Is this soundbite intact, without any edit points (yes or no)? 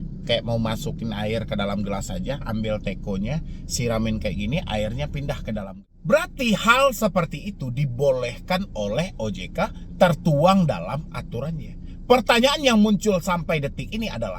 no